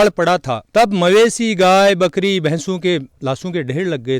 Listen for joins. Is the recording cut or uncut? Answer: uncut